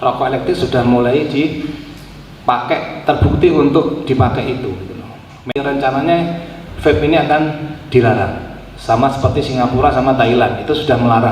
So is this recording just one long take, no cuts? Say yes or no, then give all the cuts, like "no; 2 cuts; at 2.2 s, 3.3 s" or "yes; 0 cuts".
no; 1 cut; at 5.5 s